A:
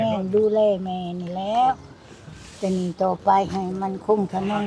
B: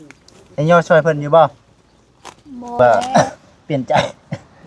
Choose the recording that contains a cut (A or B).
B